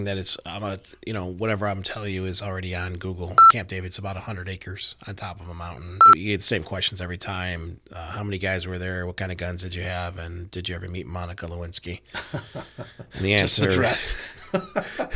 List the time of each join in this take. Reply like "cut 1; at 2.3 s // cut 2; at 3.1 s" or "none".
cut 1; at 3.5 s // cut 2; at 6.0 s